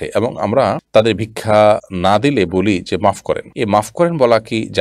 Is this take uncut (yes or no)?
no